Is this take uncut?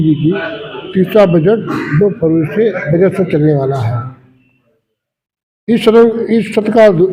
yes; 0 cuts

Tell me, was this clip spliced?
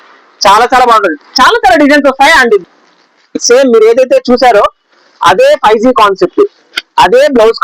yes; 1 cut; at 2.6 s

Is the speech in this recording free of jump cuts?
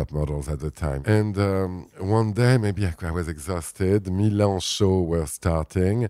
no; 1 cut; at 1.0 s

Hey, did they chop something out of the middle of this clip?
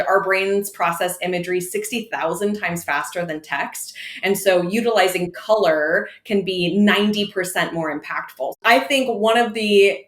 yes; 1 cut; at 8.6 s

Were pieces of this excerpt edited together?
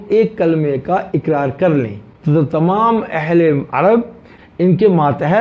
no; 0 cuts

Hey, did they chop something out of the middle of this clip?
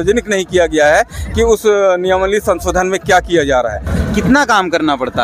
yes; 1 cut; at 3.9 s

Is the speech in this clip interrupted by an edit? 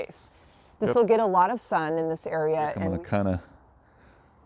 yes; 1 cut; at 2.8 s

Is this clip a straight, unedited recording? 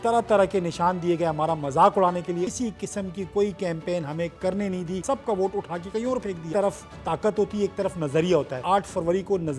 no; 4 cuts; at 2.5 s, 5.0 s, 6.5 s, 8.6 s

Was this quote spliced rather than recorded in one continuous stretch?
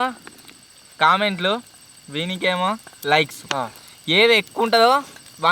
no; 0 cuts

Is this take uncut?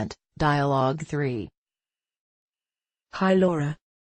no; 1 cut; at 0.9 s

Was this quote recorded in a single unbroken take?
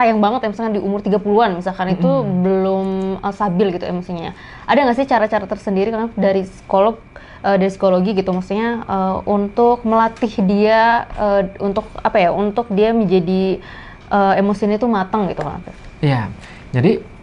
yes; 0 cuts

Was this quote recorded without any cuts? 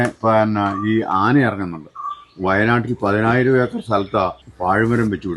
no; 1 cut; at 4.5 s

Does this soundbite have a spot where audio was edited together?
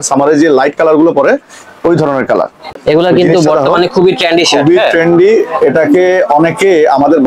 yes; 1 cut; at 2.6 s

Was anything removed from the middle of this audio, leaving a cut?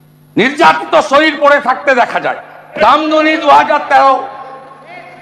yes; 1 cut; at 2.6 s

